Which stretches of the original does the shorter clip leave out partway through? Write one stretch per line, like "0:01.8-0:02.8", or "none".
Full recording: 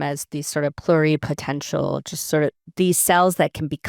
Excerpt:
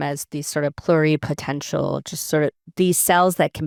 none